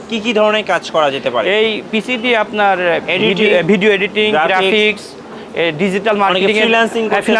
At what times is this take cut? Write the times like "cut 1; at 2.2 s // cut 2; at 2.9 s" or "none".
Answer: none